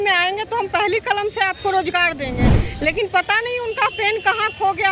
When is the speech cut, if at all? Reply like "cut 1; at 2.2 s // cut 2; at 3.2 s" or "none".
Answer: none